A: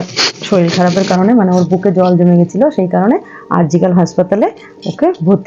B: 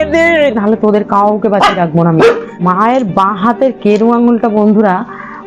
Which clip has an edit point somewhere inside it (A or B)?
B